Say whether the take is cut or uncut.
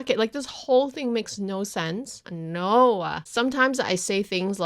cut